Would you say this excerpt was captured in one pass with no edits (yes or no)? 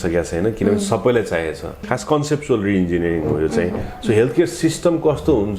no